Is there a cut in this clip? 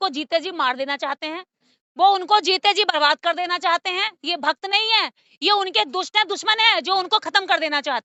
no; 0 cuts

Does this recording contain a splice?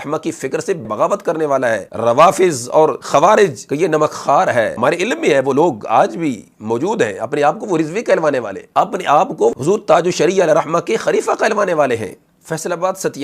yes; 6 cuts; at 0.8 s, 1.9 s, 3.0 s, 3.6 s, 4.7 s, 8.6 s

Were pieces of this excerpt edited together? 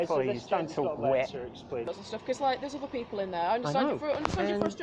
yes; 1 cut; at 2.0 s

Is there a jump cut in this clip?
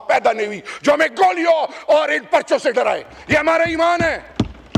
no; 0 cuts

